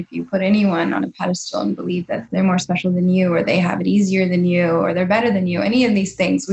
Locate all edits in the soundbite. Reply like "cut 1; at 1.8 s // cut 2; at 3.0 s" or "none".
cut 1; at 2.2 s

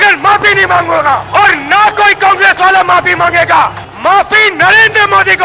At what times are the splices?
cut 1; at 1.2 s // cut 2; at 3.8 s

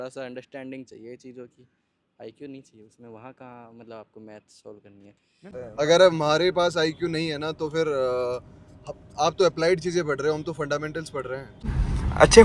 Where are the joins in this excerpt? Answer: cut 1; at 5.6 s // cut 2; at 11.7 s

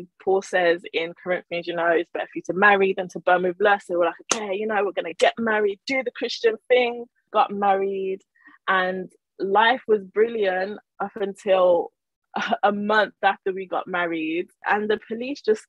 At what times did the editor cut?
cut 1; at 7.2 s // cut 2; at 14.6 s

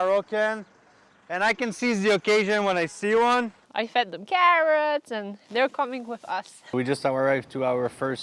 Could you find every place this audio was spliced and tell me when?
cut 1; at 3.6 s // cut 2; at 6.7 s

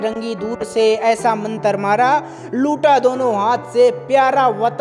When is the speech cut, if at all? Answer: none

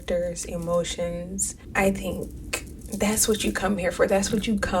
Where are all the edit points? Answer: cut 1; at 1.6 s

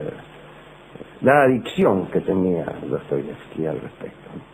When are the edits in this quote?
cut 1; at 2.3 s

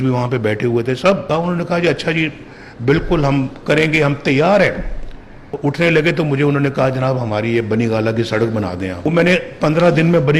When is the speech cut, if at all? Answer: cut 1; at 1.3 s // cut 2; at 5.5 s // cut 3; at 9.0 s

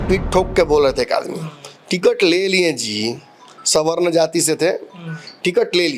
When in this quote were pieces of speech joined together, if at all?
none

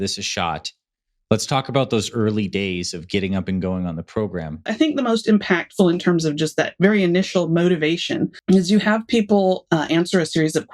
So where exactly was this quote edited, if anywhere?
cut 1; at 4.7 s // cut 2; at 8.3 s

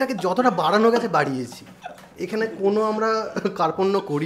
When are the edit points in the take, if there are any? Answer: none

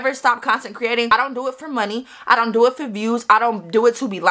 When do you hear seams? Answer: cut 1; at 1.1 s

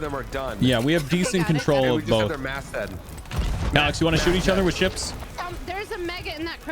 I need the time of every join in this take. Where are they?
cut 1; at 5.2 s

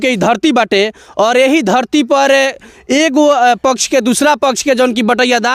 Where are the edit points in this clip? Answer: none

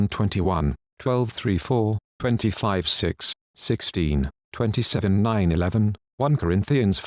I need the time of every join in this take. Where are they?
none

